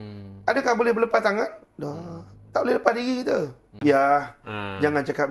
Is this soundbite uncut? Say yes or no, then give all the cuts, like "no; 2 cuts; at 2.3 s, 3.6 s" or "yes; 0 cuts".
no; 1 cut; at 3.6 s